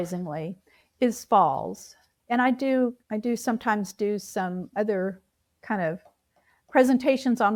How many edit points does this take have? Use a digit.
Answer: 0